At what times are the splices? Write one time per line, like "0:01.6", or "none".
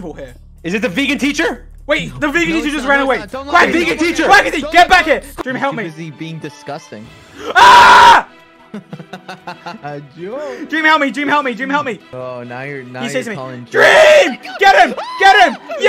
0:05.3
0:12.1